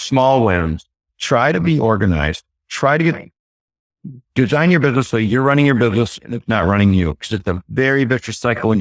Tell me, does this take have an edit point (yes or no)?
no